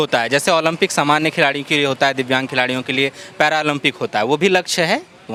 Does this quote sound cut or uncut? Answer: uncut